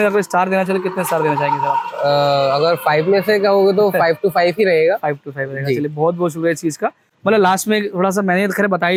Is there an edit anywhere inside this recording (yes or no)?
no